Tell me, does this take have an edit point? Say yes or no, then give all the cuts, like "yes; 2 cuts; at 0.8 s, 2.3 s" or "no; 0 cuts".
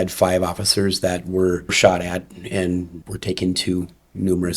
yes; 2 cuts; at 1.7 s, 3.0 s